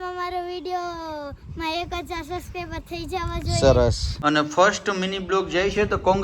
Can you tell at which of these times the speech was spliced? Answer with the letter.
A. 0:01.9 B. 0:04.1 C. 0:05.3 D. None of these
B